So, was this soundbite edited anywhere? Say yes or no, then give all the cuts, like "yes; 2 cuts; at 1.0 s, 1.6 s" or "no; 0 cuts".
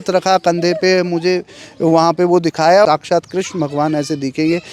yes; 1 cut; at 2.9 s